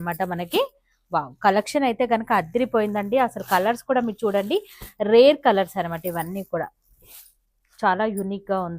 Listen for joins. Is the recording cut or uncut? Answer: uncut